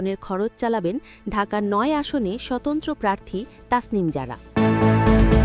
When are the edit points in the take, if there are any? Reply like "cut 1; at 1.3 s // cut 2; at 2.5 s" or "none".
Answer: cut 1; at 4.4 s